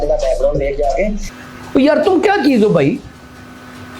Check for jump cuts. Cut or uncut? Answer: cut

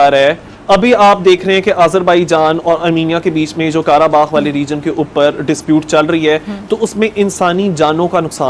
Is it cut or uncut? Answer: uncut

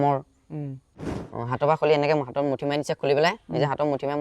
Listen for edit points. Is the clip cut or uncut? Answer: cut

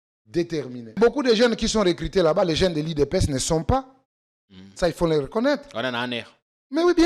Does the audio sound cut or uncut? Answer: cut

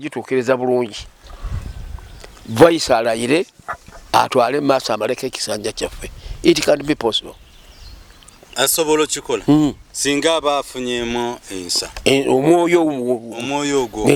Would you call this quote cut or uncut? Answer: uncut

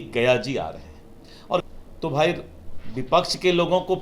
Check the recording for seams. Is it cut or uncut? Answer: cut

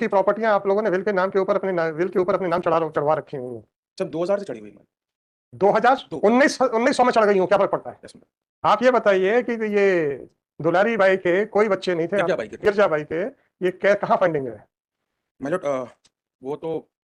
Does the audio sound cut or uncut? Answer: uncut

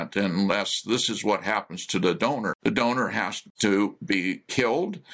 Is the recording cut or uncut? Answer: cut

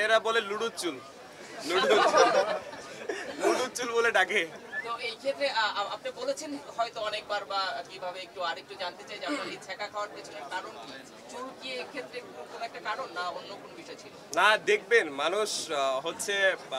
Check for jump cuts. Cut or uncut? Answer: uncut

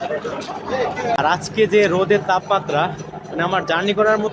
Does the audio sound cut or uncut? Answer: cut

